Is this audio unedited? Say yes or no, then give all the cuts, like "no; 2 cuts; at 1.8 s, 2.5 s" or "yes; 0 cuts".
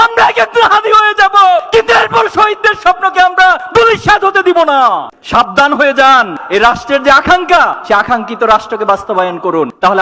no; 2 cuts; at 5.1 s, 6.3 s